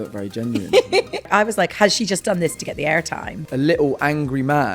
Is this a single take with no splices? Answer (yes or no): no